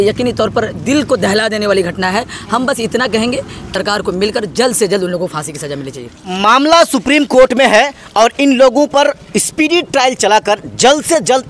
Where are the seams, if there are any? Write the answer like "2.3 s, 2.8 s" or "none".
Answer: 3.7 s